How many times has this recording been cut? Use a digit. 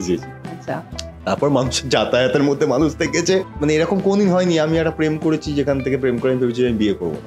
1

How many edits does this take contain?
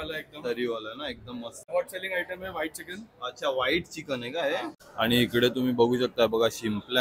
2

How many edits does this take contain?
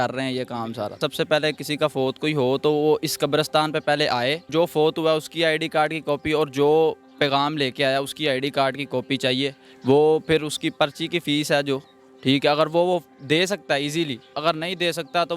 4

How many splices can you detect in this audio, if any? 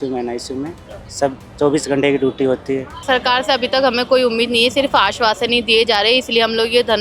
1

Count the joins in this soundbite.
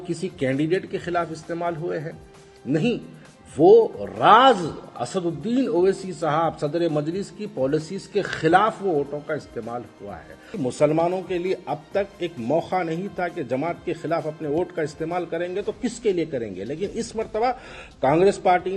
1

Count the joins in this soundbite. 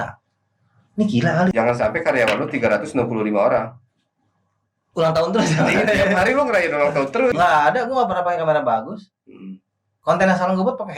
2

